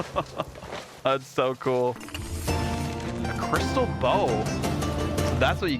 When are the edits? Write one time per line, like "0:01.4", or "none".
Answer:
0:02.0